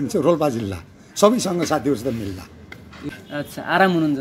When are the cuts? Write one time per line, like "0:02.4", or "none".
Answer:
0:03.1